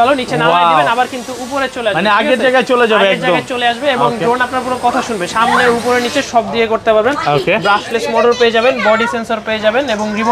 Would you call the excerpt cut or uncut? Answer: uncut